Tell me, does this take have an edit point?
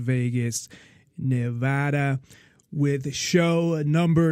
no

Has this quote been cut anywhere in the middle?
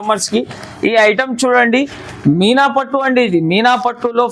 no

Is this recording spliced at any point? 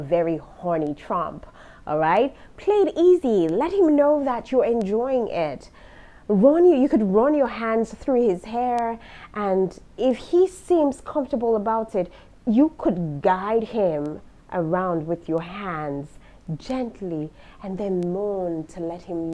no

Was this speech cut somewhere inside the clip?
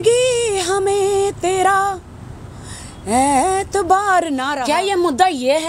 yes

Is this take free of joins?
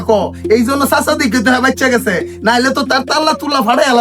yes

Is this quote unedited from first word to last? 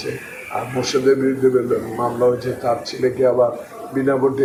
yes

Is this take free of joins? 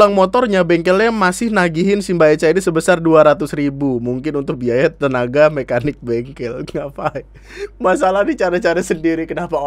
yes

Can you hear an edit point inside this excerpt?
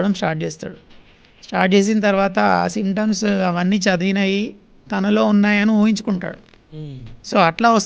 no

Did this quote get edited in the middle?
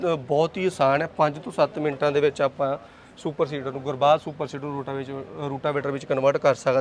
no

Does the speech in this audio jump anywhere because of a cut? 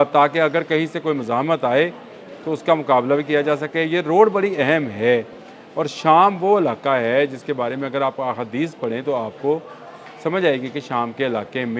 no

